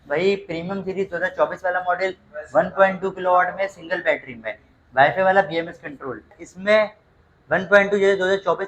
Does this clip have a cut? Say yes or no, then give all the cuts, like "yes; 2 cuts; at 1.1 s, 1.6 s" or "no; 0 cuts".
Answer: yes; 1 cut; at 6.4 s